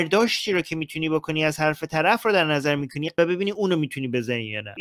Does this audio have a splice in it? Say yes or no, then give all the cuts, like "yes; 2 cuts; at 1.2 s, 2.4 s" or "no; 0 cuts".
no; 0 cuts